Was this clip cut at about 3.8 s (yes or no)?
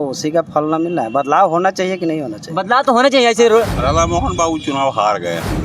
yes